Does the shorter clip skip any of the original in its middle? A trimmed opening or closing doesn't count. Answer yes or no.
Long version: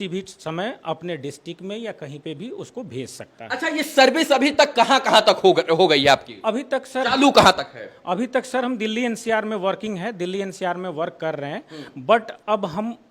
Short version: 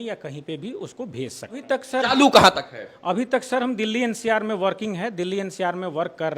yes